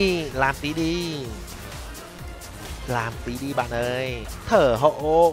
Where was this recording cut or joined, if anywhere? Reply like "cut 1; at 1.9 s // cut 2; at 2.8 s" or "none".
cut 1; at 4.3 s